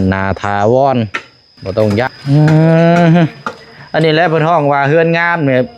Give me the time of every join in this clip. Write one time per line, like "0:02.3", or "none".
0:02.1